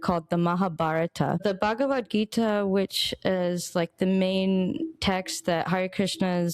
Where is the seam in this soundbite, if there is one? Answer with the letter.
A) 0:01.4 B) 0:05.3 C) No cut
A